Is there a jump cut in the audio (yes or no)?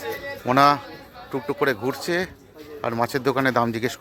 no